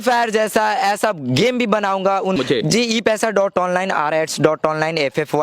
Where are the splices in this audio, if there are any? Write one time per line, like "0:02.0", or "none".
0:02.4